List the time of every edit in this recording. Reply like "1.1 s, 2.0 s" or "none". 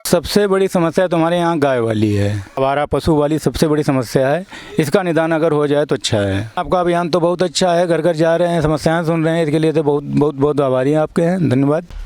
2.6 s, 6.6 s